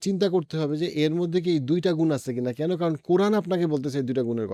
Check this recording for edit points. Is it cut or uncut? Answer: uncut